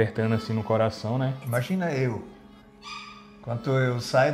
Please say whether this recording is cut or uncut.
cut